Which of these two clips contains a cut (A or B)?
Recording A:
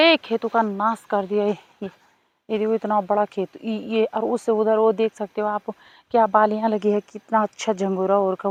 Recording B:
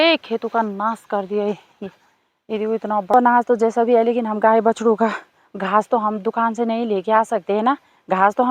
B